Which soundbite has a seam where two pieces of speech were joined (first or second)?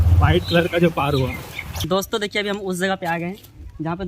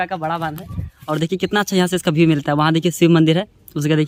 first